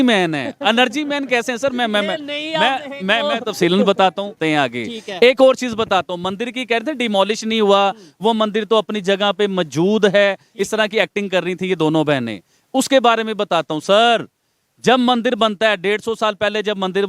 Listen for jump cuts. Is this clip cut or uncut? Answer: cut